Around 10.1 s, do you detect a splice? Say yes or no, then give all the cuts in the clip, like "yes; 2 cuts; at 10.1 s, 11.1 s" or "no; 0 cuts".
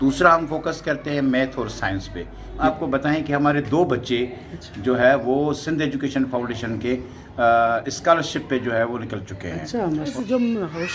yes; 2 cuts; at 2.6 s, 10.1 s